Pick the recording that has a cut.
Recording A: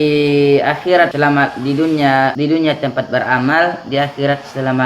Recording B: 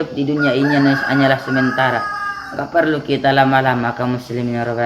A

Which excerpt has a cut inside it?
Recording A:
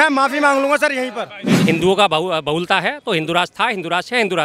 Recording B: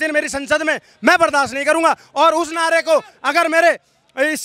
A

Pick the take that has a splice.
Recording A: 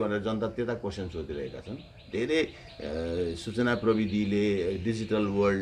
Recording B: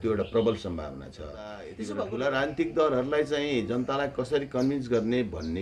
B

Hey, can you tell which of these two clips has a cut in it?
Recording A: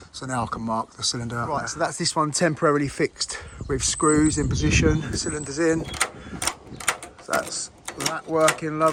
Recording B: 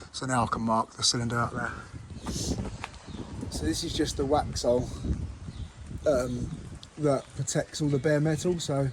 B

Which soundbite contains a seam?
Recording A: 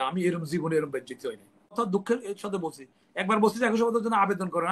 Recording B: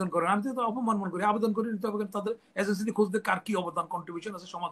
A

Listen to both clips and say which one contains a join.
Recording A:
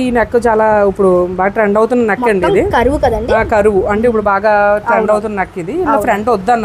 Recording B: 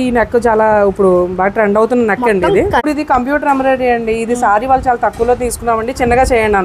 B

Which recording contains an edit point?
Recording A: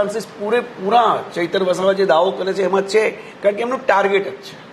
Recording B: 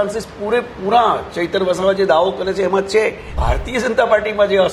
B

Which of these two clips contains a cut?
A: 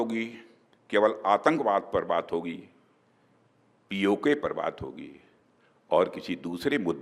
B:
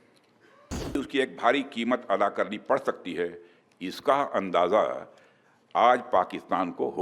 B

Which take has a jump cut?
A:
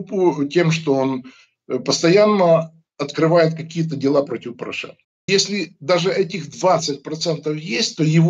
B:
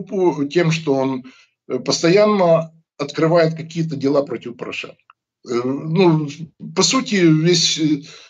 A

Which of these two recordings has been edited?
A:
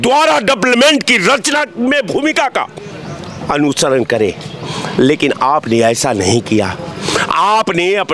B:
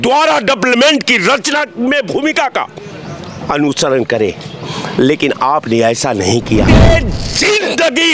B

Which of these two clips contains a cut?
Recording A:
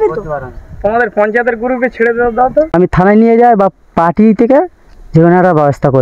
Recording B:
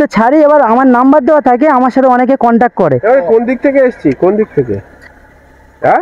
A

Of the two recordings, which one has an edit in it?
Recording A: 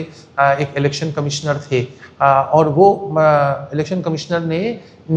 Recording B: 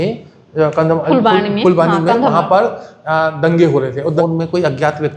B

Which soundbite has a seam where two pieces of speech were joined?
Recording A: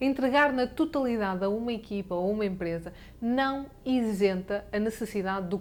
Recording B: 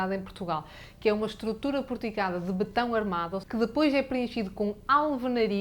B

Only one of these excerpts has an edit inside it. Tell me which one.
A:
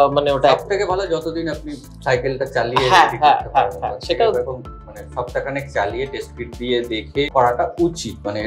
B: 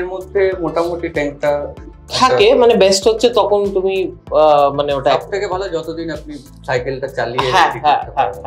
A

